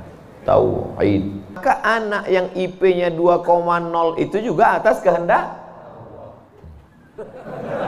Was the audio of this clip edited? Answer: yes; 1 cut; at 1.6 s

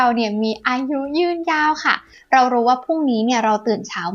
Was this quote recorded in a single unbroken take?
no; 1 cut; at 2.1 s

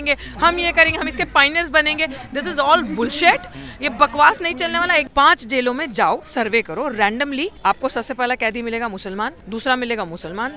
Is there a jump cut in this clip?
yes; 3 cuts; at 5.1 s, 7.5 s, 9.4 s

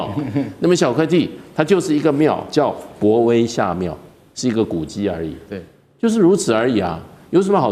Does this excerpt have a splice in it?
no; 0 cuts

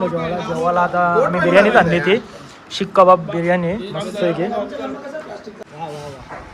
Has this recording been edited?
yes; 1 cut; at 5.5 s

